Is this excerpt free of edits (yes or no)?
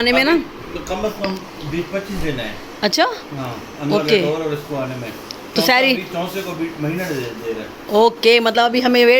yes